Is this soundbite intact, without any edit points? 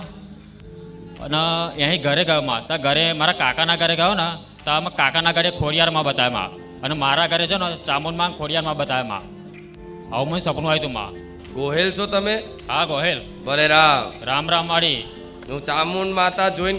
no; 1 cut; at 11.3 s

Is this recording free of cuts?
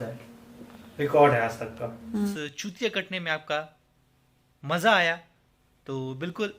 no; 1 cut; at 2.0 s

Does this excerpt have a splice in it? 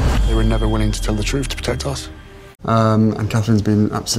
yes; 1 cut; at 2.5 s

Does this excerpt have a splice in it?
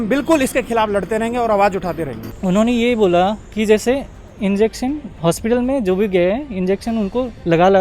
yes; 1 cut; at 2.2 s

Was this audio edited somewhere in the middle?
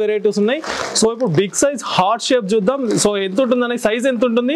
no; 0 cuts

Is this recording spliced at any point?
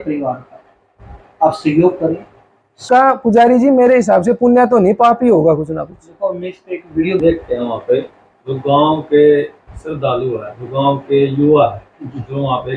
yes; 2 cuts; at 2.8 s, 7.2 s

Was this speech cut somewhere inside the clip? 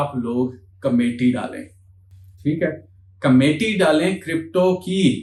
no; 0 cuts

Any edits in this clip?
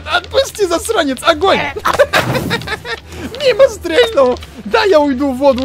no; 0 cuts

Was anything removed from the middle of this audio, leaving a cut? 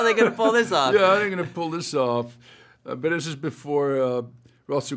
no; 0 cuts

